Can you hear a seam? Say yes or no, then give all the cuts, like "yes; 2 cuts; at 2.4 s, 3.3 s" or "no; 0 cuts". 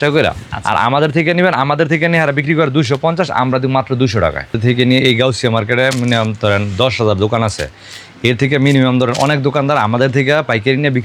yes; 1 cut; at 4.6 s